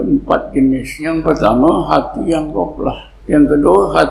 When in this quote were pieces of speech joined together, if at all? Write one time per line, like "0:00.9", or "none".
0:01.1
0:03.1